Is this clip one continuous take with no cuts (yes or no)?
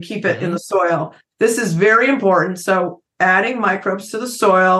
yes